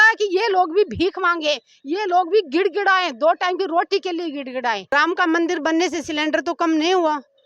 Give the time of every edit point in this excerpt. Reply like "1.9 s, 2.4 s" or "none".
4.8 s